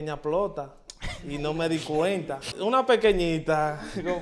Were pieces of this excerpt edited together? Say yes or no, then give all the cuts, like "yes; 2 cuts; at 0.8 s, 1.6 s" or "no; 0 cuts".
yes; 1 cut; at 2.5 s